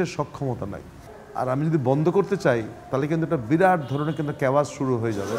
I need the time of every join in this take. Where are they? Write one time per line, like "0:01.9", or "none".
none